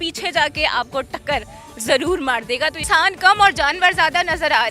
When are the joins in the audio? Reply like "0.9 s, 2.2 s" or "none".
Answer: 2.8 s